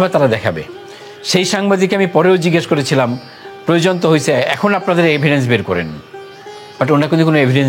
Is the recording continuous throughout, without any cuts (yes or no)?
yes